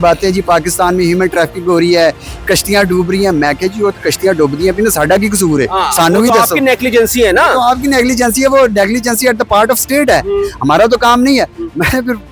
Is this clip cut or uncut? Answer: uncut